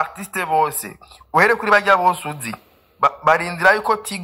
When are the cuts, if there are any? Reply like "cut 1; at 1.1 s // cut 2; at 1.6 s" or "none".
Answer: none